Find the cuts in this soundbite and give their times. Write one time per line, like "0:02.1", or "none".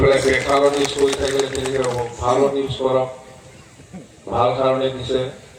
none